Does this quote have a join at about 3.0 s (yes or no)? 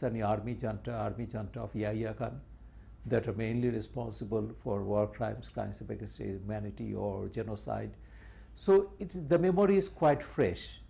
yes